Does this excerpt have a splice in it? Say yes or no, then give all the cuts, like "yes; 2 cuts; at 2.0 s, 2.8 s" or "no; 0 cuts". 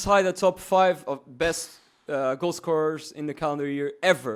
no; 0 cuts